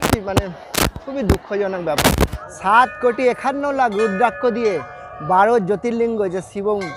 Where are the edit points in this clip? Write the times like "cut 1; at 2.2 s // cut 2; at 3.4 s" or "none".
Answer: cut 1; at 2.5 s